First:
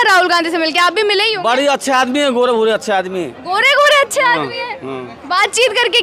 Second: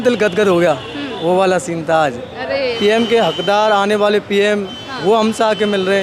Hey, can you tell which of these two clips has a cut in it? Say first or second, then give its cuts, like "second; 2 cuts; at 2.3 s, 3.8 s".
second; 1 cut; at 2.7 s